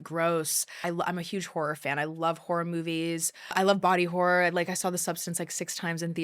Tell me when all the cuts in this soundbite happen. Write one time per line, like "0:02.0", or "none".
0:00.8
0:03.5